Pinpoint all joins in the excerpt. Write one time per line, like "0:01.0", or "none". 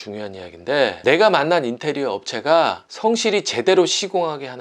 0:01.0